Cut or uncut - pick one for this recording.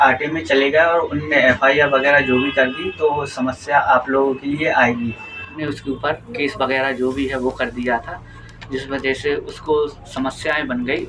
cut